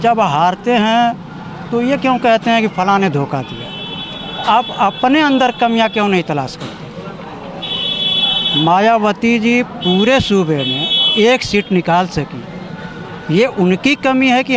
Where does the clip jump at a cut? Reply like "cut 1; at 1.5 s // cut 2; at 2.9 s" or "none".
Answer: none

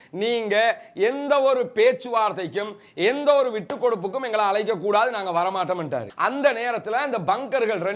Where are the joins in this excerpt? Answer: cut 1; at 6.1 s

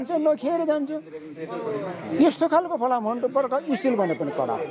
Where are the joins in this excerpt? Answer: none

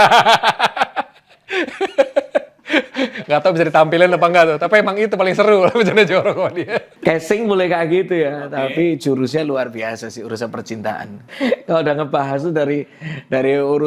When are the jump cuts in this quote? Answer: none

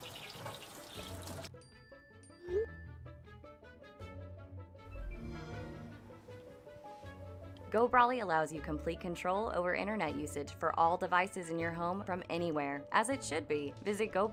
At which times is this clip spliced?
none

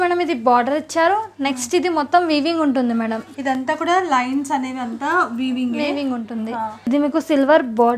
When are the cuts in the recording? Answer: cut 1; at 6.9 s

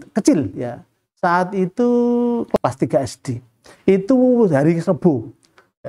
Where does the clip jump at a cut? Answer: none

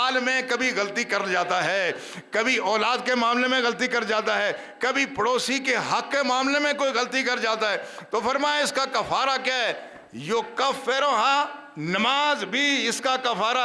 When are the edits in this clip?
none

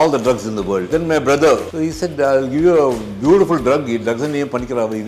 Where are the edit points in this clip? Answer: cut 1; at 0.9 s // cut 2; at 1.7 s

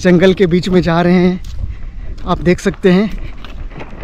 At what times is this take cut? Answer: none

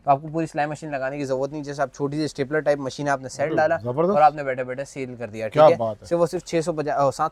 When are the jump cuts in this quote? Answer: none

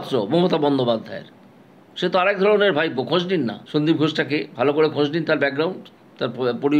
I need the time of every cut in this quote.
cut 1; at 3.6 s

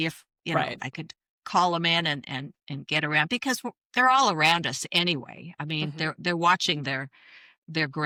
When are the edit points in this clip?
none

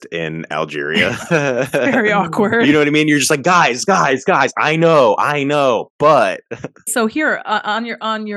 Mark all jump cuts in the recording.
none

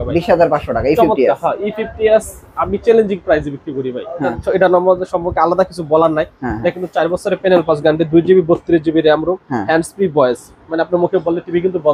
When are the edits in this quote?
cut 1; at 4.4 s

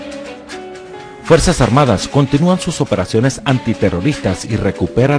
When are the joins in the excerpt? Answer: cut 1; at 1.0 s

